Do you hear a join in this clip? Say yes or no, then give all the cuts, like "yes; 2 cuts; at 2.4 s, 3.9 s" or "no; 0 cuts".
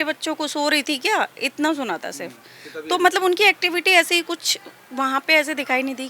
no; 0 cuts